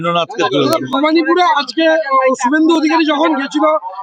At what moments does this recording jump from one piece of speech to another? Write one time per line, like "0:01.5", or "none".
none